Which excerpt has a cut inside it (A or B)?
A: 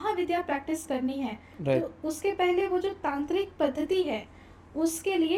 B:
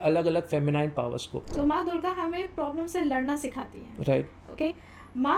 B